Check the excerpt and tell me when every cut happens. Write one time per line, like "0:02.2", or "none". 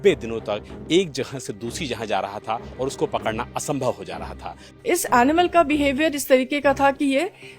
0:04.8